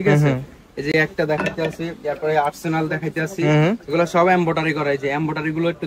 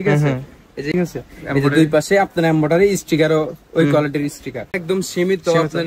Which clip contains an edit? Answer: second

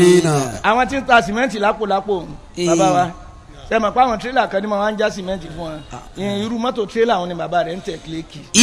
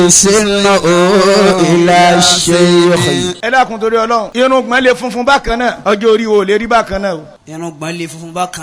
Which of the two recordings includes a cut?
second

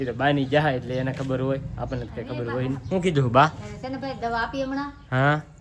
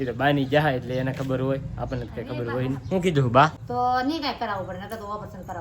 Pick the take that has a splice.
second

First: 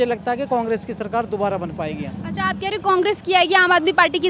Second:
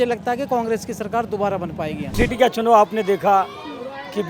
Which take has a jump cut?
second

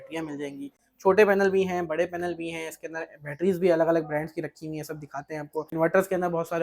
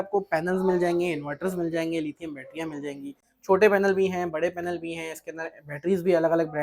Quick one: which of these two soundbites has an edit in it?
first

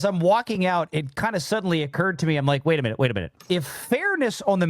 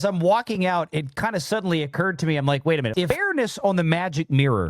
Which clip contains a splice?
second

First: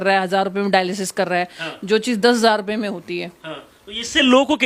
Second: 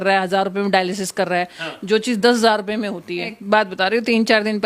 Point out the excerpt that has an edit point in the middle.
second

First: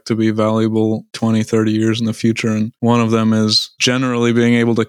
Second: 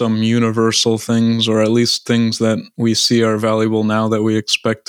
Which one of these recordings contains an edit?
first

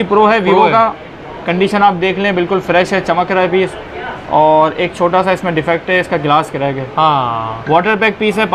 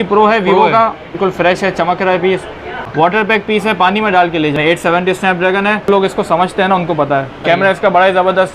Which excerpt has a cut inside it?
second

